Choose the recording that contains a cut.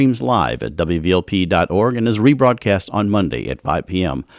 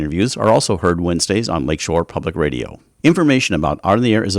second; 1 cut; at 2.9 s

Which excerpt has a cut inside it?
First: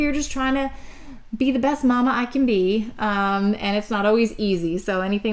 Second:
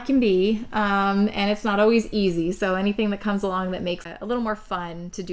second; 1 cut; at 4.0 s

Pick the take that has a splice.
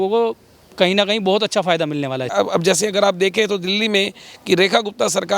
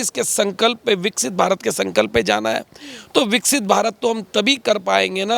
first; 1 cut; at 2.3 s

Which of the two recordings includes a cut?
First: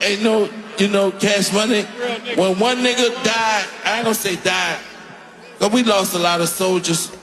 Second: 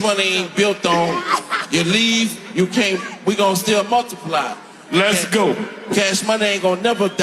second; 1 cut; at 5.7 s

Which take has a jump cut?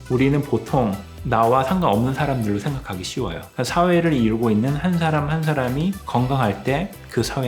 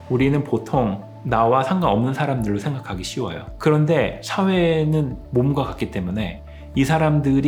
first; 1 cut; at 3.4 s

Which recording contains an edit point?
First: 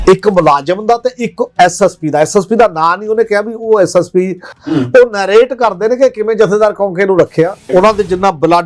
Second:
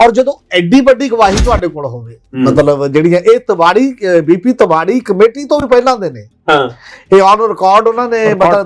first; 2 cuts; at 4.5 s, 7.7 s

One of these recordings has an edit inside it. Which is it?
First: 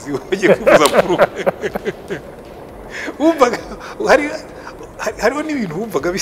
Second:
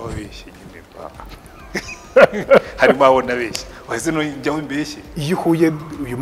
second; 1 cut; at 5.1 s

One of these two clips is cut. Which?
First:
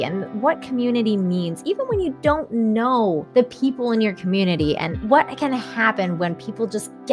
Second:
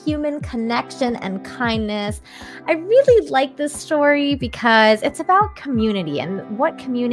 first; 2 cuts; at 3.2 s, 4.9 s

